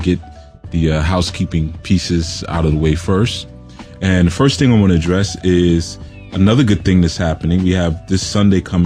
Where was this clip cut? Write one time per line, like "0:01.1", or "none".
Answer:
0:01.5